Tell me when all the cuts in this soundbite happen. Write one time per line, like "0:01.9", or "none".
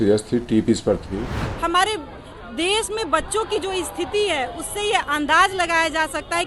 0:01.4